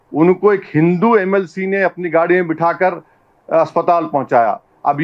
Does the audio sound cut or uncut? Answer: uncut